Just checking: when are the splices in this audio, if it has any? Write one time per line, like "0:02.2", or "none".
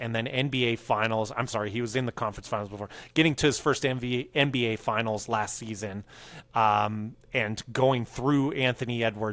none